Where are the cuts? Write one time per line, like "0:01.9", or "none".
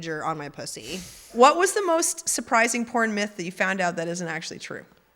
0:01.3